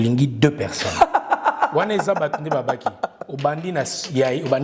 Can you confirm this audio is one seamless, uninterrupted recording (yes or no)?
yes